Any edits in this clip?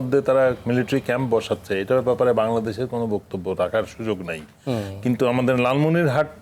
no; 0 cuts

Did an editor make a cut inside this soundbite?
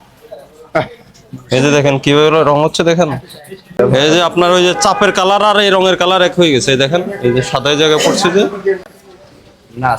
yes; 1 cut; at 3.8 s

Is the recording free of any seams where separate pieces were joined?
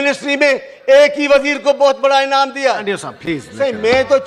yes; 0 cuts

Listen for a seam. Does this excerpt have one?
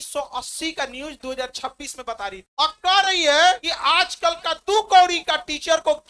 no; 0 cuts

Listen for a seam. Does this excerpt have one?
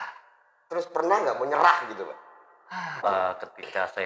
yes; 1 cut; at 2.9 s

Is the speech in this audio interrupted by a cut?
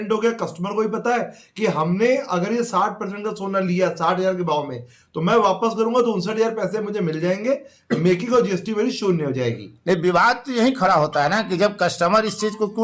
no; 0 cuts

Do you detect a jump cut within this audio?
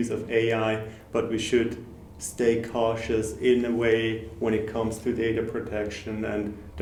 no; 0 cuts

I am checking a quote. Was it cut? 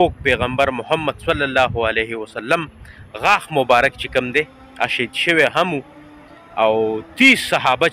no; 0 cuts

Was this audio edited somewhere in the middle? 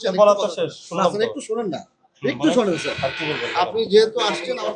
no; 0 cuts

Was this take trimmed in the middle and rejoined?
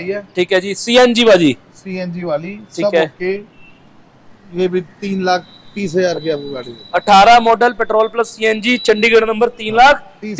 no; 0 cuts

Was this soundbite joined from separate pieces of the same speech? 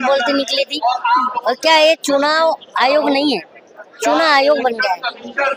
no; 0 cuts

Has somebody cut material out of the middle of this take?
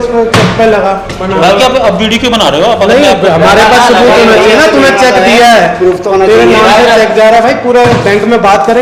no; 0 cuts

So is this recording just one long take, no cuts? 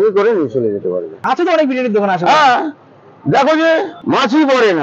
no; 2 cuts; at 1.1 s, 4.0 s

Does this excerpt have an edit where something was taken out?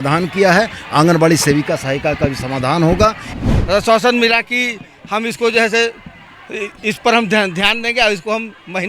yes; 1 cut; at 3.4 s

